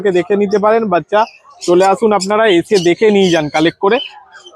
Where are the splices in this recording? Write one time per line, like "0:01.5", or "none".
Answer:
none